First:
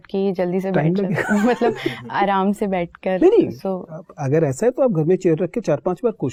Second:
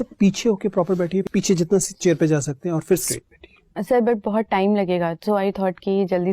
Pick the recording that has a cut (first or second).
second